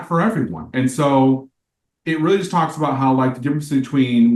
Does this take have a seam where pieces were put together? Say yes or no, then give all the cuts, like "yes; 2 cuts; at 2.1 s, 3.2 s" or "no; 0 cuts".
no; 0 cuts